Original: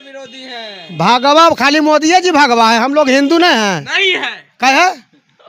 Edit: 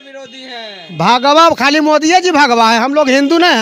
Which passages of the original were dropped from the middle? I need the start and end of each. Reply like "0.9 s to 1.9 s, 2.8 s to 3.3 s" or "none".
none